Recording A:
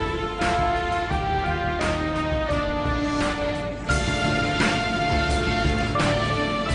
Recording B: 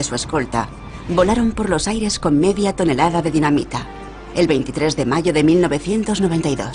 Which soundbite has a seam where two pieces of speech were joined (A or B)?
A